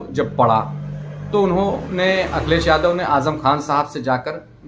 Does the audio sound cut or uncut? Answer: uncut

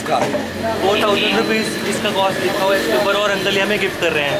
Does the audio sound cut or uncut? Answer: uncut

